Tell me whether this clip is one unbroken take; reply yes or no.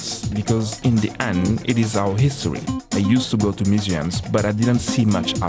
no